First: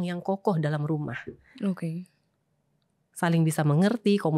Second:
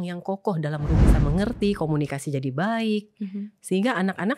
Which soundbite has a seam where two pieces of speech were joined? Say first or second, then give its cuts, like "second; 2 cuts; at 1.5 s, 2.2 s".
second; 1 cut; at 1.1 s